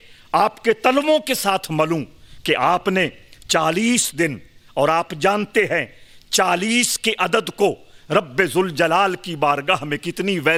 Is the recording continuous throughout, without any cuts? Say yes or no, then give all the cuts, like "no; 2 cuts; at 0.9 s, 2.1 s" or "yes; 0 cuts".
yes; 0 cuts